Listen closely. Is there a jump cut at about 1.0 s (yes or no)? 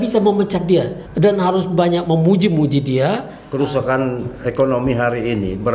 yes